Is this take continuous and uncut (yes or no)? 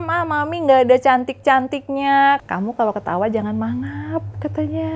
no